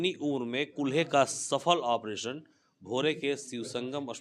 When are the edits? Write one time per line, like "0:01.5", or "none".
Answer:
none